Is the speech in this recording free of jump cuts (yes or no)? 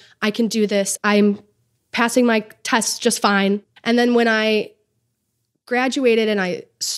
no